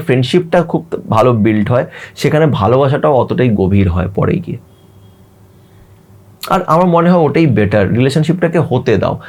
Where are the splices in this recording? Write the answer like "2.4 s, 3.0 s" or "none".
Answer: none